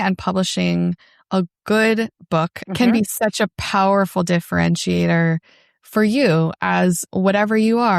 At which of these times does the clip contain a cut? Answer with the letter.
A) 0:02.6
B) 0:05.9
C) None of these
A